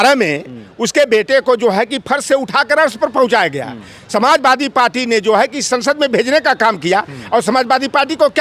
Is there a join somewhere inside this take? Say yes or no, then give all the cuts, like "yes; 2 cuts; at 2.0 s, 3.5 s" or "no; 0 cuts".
no; 0 cuts